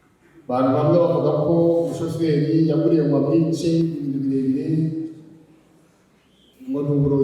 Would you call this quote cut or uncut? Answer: uncut